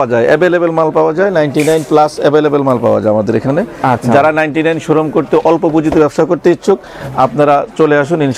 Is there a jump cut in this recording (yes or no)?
no